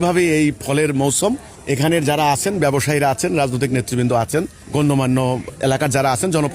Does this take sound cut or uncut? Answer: cut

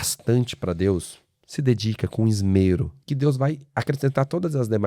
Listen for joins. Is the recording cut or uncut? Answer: cut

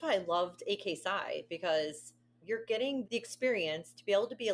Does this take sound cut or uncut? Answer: cut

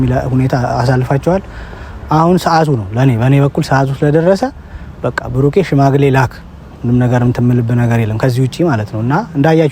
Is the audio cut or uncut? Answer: uncut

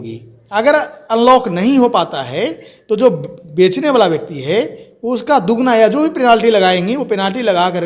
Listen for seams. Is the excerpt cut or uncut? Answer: uncut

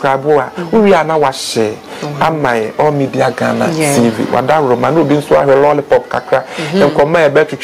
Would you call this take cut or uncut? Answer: uncut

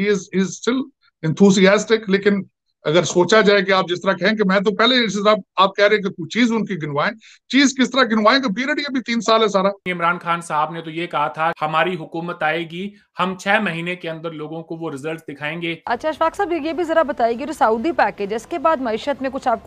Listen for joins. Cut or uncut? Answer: cut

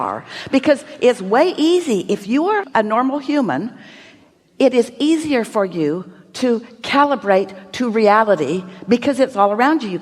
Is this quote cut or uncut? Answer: uncut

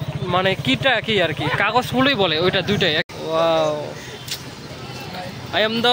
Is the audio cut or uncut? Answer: cut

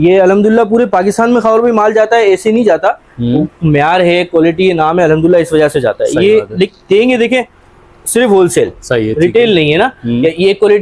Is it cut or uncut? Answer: uncut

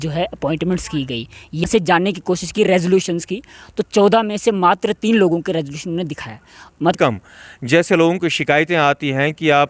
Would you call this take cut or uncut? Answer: cut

